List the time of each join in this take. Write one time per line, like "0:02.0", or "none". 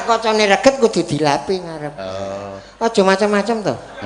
none